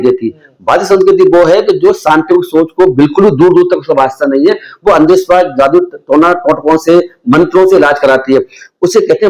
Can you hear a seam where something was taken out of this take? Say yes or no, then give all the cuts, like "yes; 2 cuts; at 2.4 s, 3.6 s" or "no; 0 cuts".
no; 0 cuts